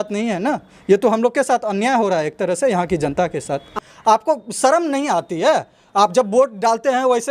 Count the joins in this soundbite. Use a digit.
1